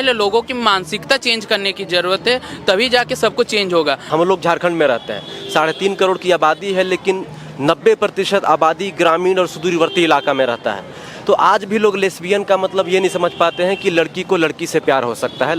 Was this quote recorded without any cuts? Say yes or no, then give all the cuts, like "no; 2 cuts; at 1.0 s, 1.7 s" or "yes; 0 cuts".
no; 1 cut; at 4.0 s